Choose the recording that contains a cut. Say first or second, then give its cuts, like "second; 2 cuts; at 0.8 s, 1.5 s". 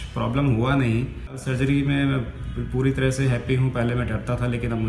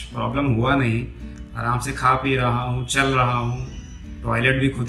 first; 1 cut; at 1.5 s